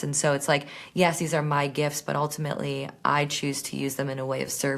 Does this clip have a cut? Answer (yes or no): no